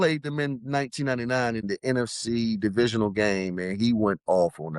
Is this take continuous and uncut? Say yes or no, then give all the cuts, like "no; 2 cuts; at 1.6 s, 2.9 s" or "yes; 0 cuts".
no; 1 cut; at 1.6 s